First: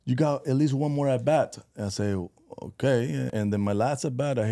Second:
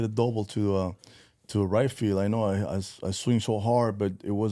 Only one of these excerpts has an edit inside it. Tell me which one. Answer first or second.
first